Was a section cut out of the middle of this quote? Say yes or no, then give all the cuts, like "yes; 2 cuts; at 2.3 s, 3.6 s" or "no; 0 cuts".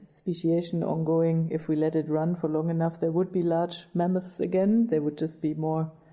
no; 0 cuts